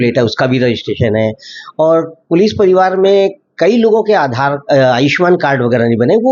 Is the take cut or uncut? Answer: uncut